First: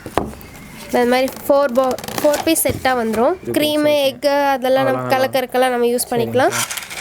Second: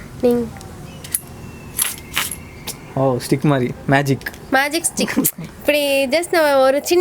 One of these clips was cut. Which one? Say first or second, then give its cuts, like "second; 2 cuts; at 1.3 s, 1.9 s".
first; 1 cut; at 3.5 s